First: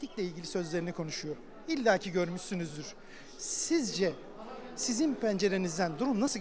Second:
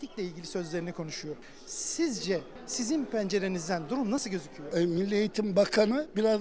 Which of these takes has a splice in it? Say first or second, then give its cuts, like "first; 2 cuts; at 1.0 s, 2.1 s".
second; 3 cuts; at 1.5 s, 2.6 s, 4.6 s